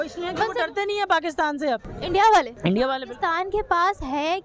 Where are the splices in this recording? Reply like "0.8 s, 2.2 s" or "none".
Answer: 1.9 s, 2.5 s